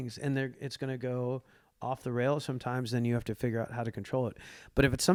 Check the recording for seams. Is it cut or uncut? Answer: uncut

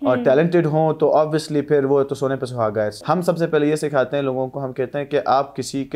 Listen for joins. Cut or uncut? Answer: cut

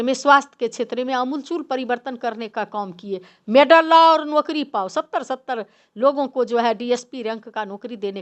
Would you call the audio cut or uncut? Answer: uncut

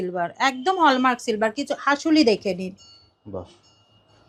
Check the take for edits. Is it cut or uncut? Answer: uncut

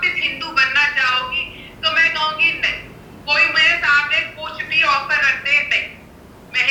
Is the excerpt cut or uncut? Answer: uncut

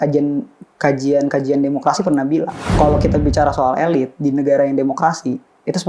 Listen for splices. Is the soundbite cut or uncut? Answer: cut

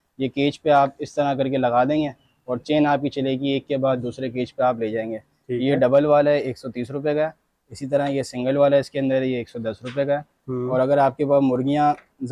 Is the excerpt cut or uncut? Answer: uncut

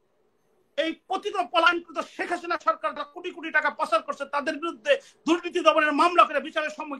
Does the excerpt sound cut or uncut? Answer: uncut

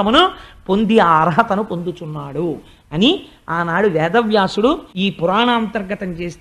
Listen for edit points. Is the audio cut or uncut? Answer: cut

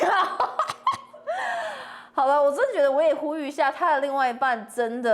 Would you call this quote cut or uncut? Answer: uncut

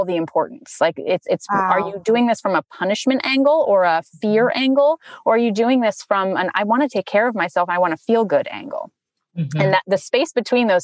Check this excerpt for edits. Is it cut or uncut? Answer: uncut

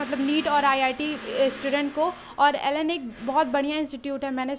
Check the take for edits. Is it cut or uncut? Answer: uncut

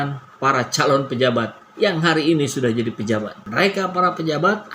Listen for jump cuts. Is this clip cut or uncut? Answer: cut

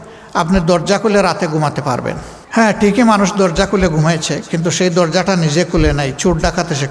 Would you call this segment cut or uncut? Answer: cut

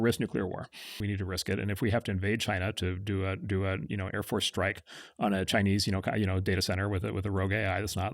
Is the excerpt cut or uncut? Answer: cut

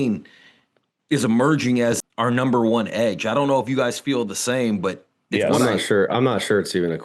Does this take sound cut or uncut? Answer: uncut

